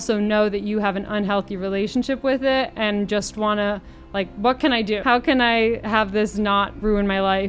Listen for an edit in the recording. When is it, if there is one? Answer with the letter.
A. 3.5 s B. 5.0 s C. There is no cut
B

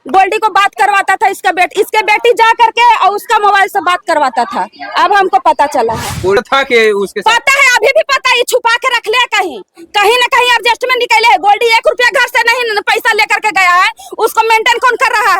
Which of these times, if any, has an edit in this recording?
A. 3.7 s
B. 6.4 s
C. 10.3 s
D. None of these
B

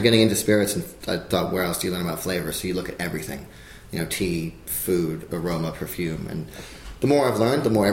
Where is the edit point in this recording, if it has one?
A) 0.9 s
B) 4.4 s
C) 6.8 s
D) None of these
A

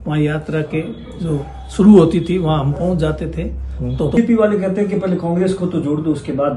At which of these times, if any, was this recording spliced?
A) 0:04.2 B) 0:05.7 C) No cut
A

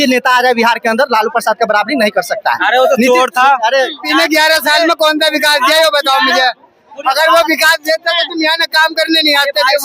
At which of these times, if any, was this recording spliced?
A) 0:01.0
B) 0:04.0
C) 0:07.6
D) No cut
B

